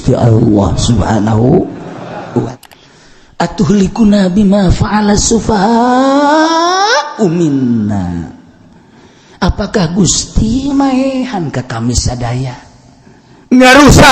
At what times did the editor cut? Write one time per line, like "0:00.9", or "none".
0:02.6